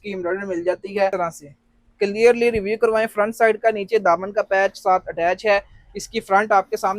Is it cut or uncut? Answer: cut